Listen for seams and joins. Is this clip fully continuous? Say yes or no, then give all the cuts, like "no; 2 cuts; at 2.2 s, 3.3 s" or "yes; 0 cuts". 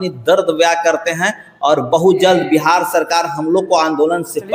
yes; 0 cuts